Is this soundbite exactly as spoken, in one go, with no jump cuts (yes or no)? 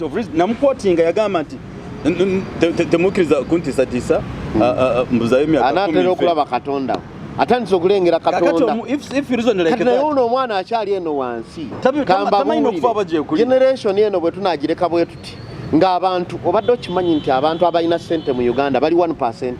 yes